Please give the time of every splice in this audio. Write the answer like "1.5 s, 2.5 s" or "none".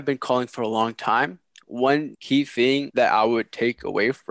2.9 s